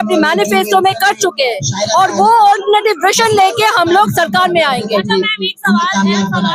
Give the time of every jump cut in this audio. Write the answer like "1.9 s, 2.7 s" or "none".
none